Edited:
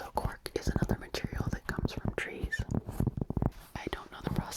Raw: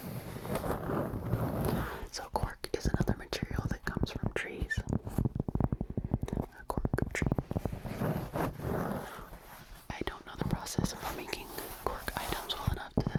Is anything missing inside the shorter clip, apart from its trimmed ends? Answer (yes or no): yes